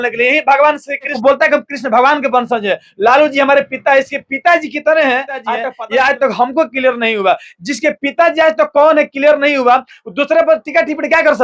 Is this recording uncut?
no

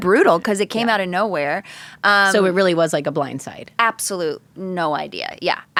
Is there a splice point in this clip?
no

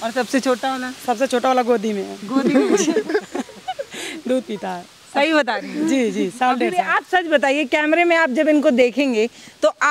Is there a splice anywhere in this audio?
no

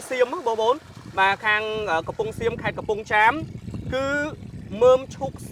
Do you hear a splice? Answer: no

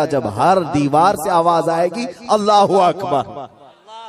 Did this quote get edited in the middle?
no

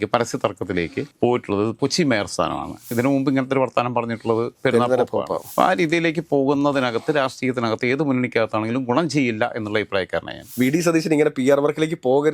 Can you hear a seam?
yes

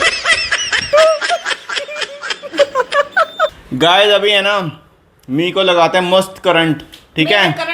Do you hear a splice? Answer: yes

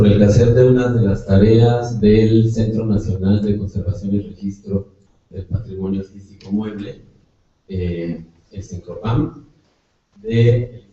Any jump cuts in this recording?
yes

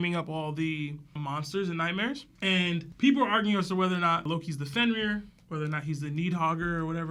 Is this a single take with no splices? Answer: yes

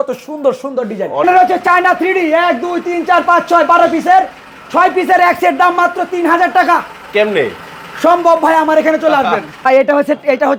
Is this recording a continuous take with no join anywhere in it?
no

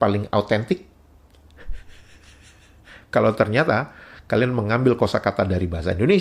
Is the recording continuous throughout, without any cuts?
yes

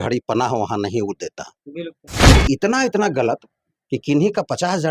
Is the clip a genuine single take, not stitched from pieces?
no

